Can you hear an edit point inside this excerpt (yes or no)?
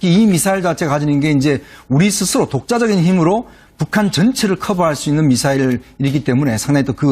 yes